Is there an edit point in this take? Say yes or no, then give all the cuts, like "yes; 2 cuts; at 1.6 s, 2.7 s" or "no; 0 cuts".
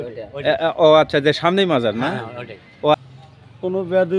yes; 1 cut; at 3.0 s